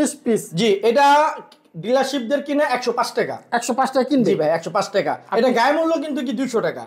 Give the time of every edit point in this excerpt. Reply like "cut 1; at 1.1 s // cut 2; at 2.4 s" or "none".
none

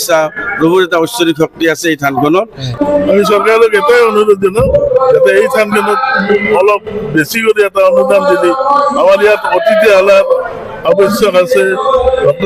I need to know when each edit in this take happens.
cut 1; at 2.8 s

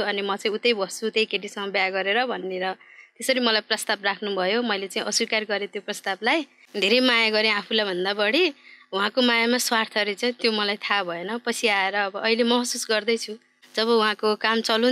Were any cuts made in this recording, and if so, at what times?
cut 1; at 6.6 s // cut 2; at 13.5 s

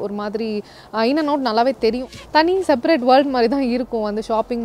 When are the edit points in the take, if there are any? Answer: cut 1; at 2.2 s

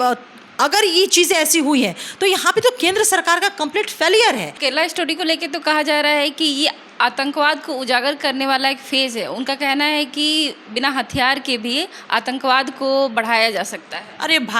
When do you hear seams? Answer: cut 1; at 4.6 s

